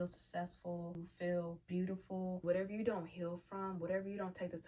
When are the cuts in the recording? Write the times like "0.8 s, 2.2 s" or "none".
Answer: 1.1 s, 2.4 s